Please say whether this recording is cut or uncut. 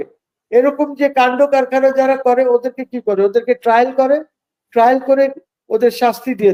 uncut